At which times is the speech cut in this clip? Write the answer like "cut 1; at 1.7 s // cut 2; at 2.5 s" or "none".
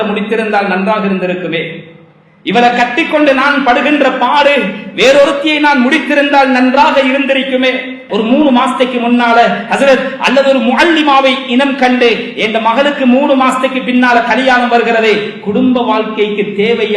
cut 1; at 8.0 s